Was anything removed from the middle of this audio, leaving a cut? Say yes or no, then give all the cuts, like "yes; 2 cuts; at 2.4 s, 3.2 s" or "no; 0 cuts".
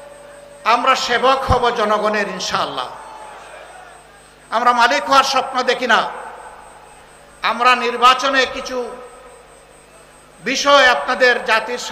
no; 0 cuts